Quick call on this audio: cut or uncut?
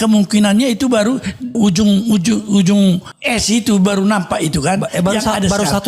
cut